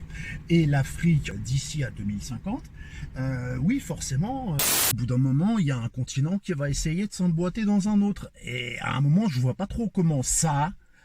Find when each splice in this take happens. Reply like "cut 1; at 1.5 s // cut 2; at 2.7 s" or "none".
cut 1; at 1.3 s // cut 2; at 5.0 s